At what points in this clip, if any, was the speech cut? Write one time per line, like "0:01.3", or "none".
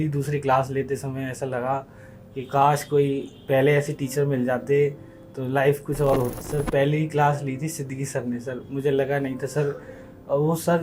0:06.3

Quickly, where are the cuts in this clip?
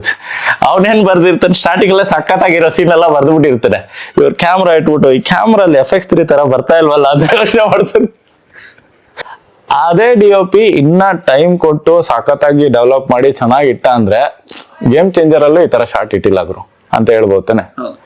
0:09.0

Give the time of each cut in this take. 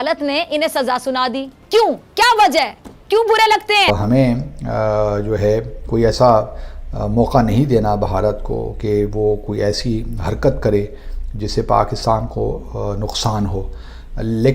0:01.5
0:03.9

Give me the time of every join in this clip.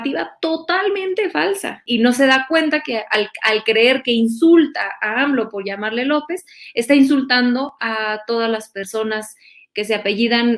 0:01.8

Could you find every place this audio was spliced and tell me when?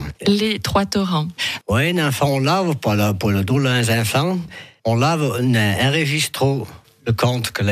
0:01.6

